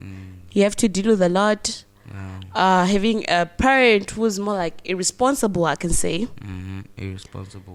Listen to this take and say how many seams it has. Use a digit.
0